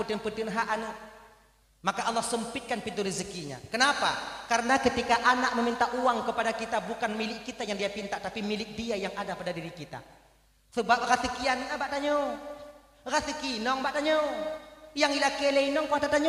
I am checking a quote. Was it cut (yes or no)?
no